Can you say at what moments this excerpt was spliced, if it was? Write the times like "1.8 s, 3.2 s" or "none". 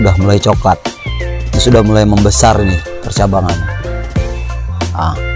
3.5 s